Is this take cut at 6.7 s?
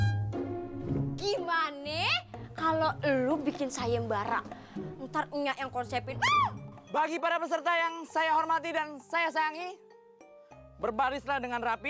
yes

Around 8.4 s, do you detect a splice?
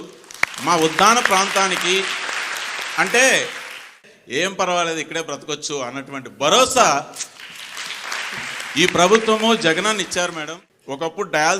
yes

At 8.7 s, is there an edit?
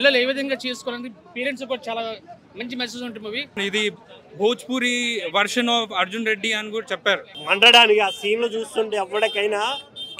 no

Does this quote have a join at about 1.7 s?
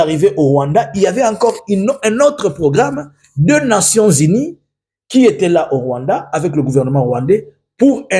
no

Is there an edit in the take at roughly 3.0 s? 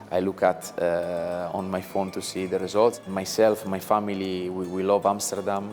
yes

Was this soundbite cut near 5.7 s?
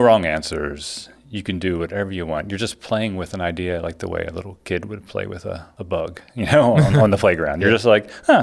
yes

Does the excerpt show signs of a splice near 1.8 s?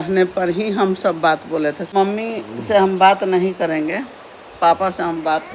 yes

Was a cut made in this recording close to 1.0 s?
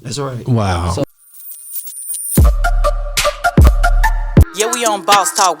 yes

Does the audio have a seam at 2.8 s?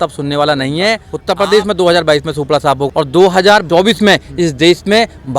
yes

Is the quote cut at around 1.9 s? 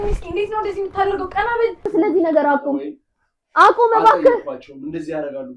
yes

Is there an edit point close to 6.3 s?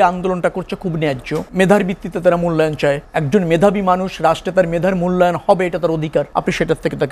yes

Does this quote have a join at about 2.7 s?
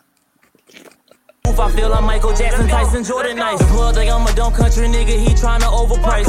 no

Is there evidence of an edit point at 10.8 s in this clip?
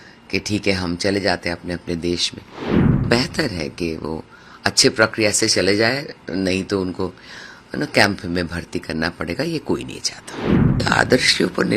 yes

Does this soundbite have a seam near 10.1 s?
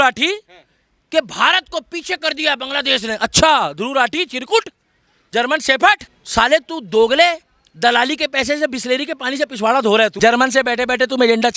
yes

